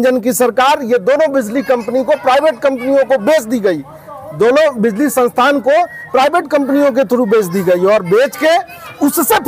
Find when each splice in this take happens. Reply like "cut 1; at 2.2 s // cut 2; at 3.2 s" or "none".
none